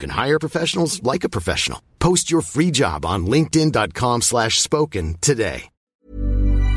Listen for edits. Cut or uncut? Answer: cut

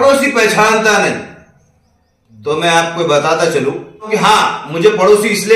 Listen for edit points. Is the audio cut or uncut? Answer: cut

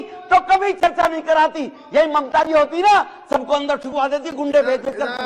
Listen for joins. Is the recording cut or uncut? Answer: uncut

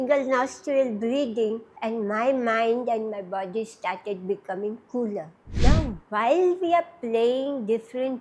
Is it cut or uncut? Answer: cut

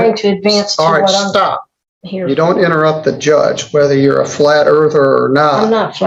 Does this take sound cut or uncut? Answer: uncut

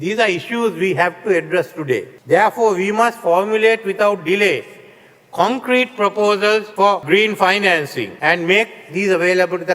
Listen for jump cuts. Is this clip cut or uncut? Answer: cut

